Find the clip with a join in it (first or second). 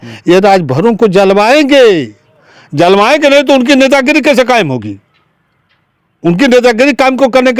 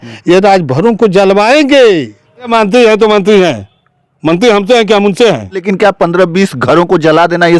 second